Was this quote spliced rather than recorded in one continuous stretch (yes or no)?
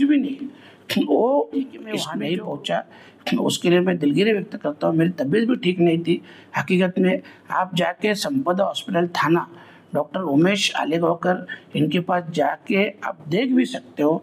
yes